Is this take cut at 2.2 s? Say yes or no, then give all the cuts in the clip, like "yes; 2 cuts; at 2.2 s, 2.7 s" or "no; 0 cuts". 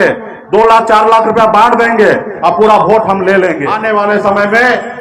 no; 1 cut; at 3.7 s